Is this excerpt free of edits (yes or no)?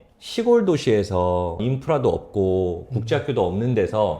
no